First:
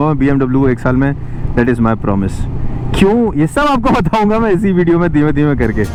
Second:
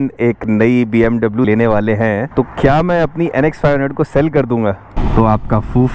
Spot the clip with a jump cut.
second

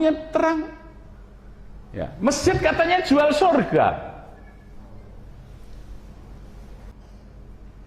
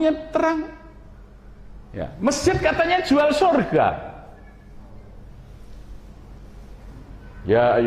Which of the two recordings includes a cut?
first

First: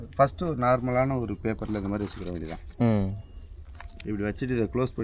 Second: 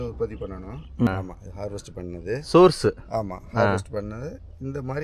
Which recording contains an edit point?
second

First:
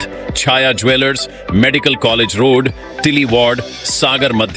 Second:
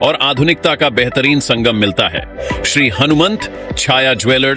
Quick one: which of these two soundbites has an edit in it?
second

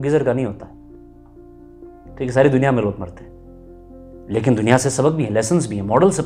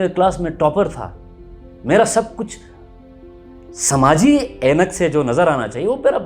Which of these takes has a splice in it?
second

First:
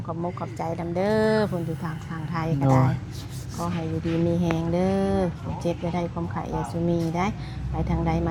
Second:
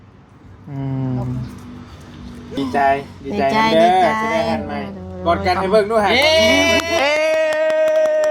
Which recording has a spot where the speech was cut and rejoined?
second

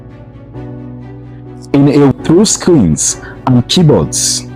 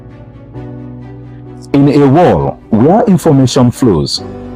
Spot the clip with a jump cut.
first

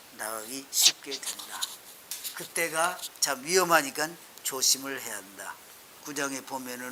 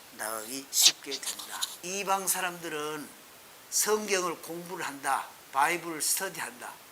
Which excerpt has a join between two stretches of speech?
second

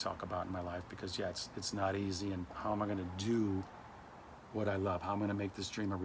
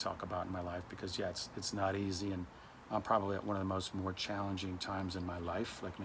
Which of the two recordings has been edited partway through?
first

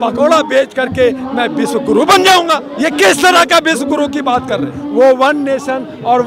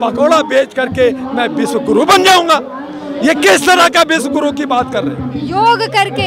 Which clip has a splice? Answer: first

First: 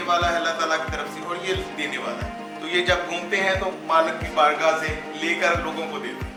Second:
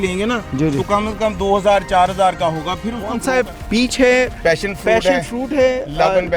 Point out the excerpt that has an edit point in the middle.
second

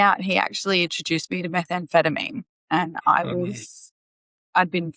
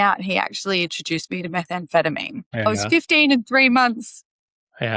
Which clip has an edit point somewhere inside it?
second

